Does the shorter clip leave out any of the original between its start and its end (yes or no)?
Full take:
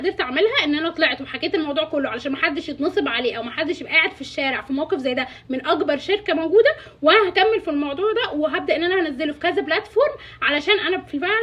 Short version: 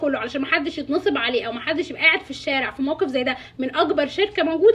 no